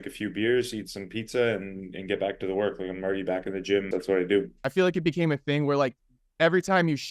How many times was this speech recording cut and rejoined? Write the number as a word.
two